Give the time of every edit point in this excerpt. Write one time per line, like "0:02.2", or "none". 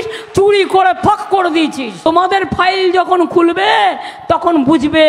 0:02.0